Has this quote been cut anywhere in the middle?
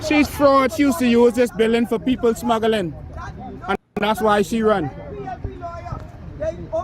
no; 0 cuts

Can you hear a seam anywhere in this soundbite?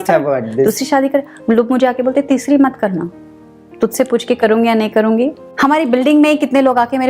yes; 1 cut; at 5.4 s

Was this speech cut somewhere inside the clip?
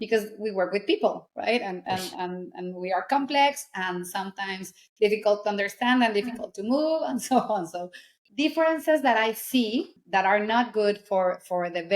yes; 2 cuts; at 8.2 s, 10.0 s

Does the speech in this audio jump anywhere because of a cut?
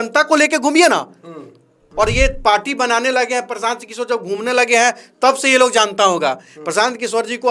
yes; 1 cut; at 1.8 s

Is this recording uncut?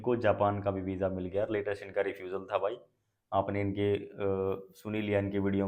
yes; 0 cuts

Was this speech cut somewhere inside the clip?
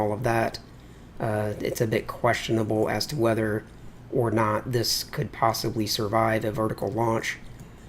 yes; 1 cut; at 2.8 s

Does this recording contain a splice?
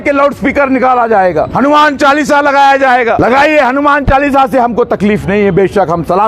yes; 2 cuts; at 1.5 s, 3.2 s

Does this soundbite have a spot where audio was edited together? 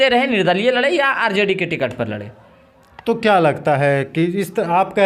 no; 0 cuts

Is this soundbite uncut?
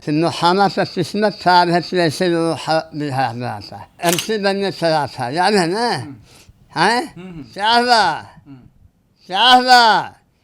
no; 1 cut; at 3.8 s

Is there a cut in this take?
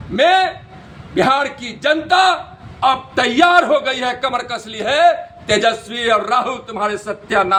no; 0 cuts

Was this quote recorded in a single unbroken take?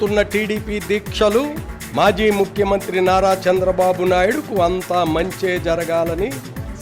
yes; 0 cuts

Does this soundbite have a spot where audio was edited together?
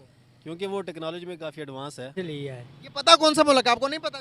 yes; 1 cut; at 2.1 s

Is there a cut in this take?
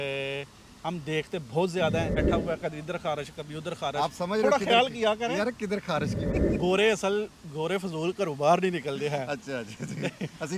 yes; 2 cuts; at 2.2 s, 6.2 s

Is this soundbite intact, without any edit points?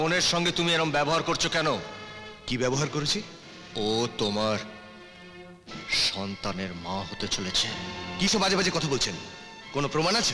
yes; 0 cuts

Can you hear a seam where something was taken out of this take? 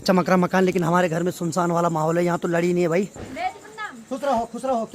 yes; 1 cut; at 3.1 s

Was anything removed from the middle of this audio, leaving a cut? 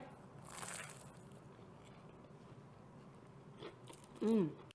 no; 0 cuts

